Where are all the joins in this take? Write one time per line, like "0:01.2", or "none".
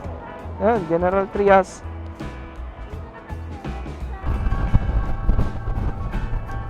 0:04.3